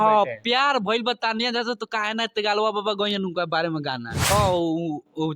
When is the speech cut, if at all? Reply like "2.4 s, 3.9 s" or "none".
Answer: 4.3 s